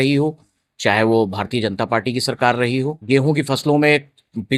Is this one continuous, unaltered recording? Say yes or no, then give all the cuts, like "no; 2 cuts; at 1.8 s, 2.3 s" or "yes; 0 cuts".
no; 1 cut; at 3.0 s